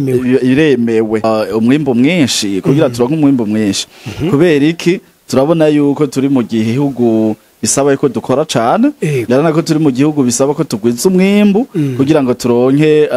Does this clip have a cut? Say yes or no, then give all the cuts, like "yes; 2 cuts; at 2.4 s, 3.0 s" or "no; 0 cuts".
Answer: yes; 1 cut; at 1.2 s